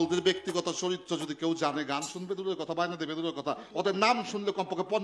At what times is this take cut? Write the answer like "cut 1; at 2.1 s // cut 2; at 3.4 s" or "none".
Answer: none

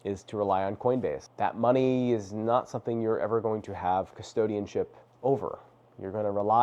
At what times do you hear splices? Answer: cut 1; at 1.2 s

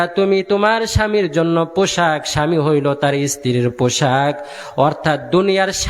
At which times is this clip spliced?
none

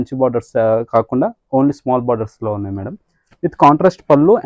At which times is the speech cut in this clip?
none

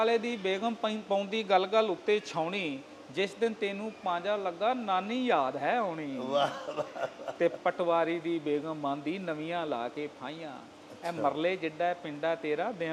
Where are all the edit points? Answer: none

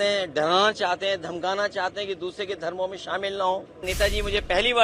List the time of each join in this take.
cut 1; at 3.9 s

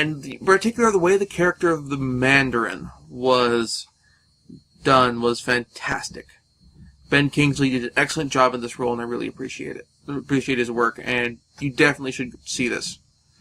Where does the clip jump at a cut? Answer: cut 1; at 8.5 s

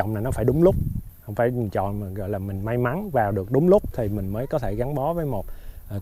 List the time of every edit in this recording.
cut 1; at 1.0 s

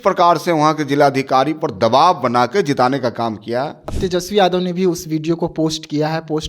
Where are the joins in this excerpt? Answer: cut 1; at 3.8 s

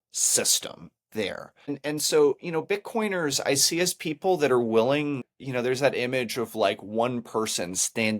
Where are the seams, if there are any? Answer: cut 1; at 1.7 s // cut 2; at 5.3 s

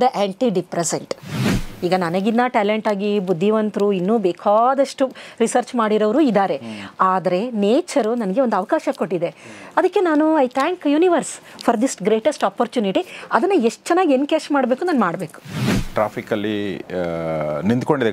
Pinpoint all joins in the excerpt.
cut 1; at 1.4 s // cut 2; at 15.8 s

